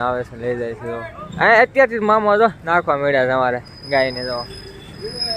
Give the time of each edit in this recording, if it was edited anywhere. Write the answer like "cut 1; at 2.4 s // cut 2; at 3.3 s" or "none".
cut 1; at 1.2 s